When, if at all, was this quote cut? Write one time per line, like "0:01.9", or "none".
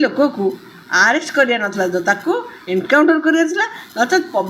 none